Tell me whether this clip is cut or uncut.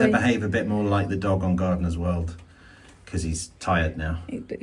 uncut